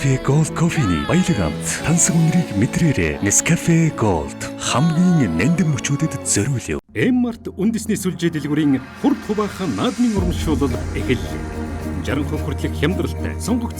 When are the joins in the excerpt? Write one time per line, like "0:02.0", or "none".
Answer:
0:06.9